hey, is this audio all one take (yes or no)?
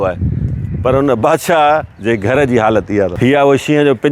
no